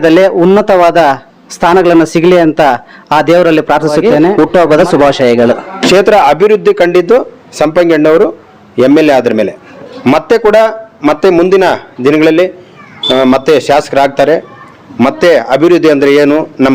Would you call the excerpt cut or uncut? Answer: cut